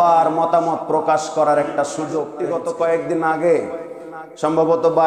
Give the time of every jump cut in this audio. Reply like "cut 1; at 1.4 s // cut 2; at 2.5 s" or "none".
cut 1; at 2.4 s